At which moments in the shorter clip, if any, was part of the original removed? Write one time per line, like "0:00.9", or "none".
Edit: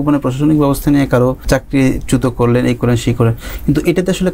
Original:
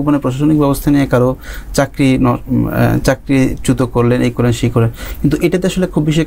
0:01.4